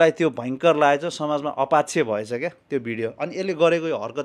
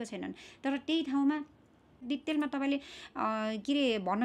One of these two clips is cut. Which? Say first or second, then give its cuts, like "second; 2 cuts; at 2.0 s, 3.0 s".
second; 1 cut; at 2.0 s